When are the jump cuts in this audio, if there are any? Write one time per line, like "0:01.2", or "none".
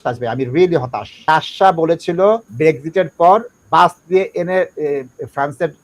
0:01.1
0:02.5